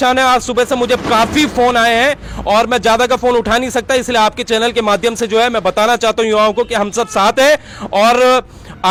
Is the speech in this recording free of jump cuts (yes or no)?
yes